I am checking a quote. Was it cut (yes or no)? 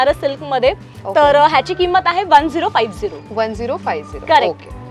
no